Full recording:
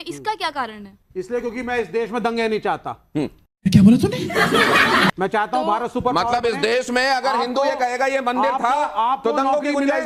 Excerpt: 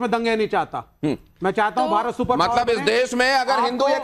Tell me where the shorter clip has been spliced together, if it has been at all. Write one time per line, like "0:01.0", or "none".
0:01.4